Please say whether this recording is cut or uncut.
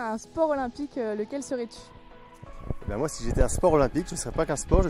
uncut